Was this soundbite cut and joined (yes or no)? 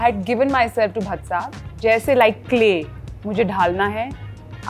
yes